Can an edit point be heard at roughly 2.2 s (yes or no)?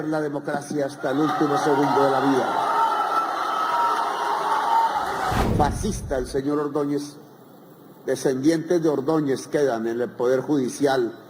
no